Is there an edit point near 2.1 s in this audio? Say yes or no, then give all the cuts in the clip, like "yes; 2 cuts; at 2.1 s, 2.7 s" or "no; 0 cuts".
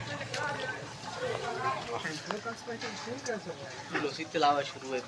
yes; 1 cut; at 2.1 s